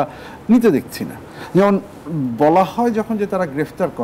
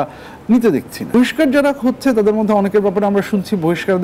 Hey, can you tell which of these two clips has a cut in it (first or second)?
second